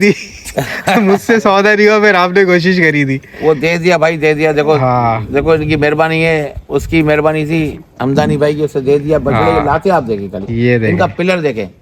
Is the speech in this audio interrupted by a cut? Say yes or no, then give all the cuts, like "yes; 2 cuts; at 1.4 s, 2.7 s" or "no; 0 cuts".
no; 0 cuts